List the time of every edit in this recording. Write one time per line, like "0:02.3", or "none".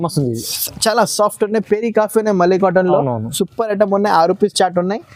none